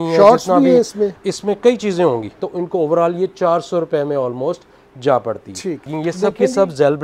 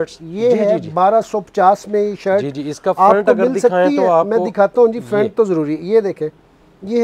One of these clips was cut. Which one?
first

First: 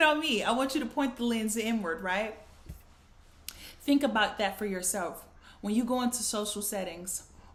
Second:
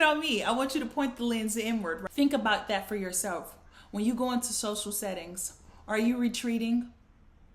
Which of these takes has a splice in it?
second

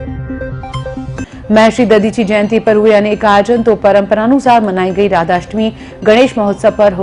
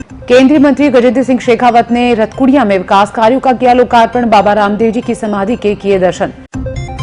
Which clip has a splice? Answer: first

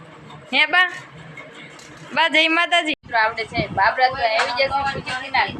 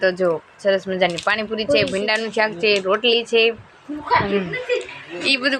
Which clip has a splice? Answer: first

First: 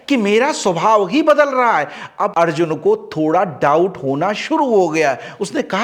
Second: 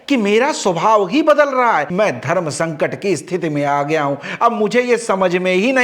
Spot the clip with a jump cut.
second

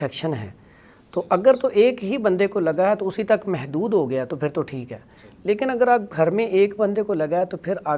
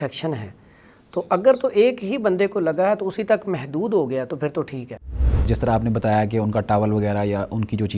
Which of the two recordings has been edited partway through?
second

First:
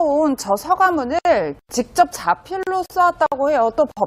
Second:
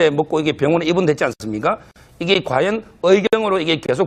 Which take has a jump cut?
first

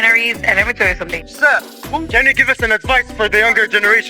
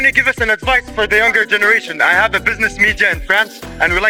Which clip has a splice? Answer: first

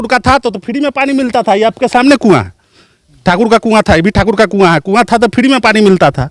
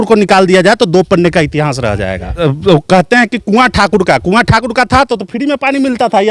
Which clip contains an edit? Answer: second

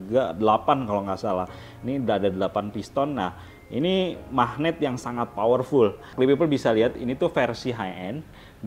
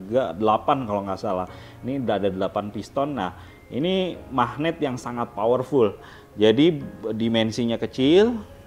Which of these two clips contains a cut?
first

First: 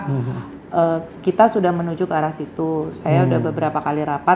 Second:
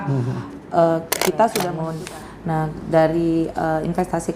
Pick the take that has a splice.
second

